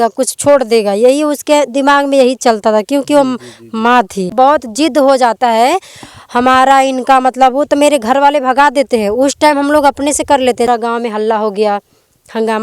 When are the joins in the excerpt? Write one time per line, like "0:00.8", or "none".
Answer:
0:04.3
0:10.7